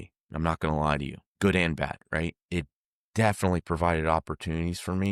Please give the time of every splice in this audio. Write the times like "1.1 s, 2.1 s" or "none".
none